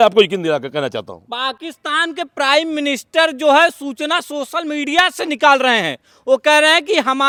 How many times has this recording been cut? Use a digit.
0